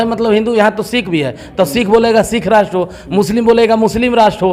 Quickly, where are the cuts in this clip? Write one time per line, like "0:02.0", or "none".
none